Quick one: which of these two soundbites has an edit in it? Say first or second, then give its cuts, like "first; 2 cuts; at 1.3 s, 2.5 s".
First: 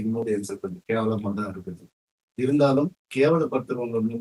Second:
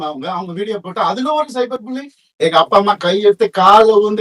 second; 1 cut; at 2.2 s